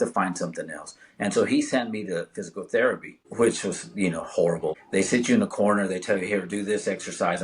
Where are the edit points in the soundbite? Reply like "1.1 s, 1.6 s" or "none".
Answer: 3.2 s, 4.8 s